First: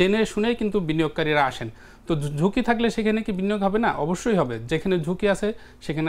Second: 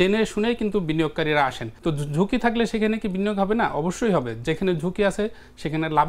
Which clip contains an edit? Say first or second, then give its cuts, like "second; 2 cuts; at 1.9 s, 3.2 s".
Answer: second; 1 cut; at 1.7 s